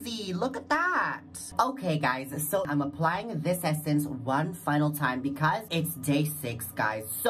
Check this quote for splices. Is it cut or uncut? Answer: uncut